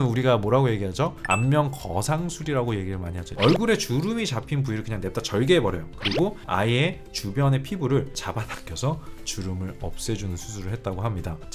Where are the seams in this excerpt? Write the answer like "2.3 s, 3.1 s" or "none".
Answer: 3.3 s